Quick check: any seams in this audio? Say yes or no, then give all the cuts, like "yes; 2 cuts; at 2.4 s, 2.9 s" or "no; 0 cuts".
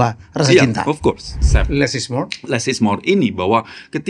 yes; 1 cut; at 1.4 s